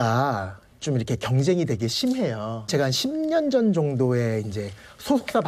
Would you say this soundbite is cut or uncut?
uncut